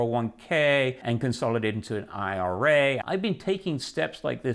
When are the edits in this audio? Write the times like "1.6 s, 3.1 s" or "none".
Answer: 1.0 s, 3.0 s